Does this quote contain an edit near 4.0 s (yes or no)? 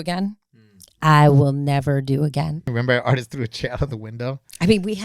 no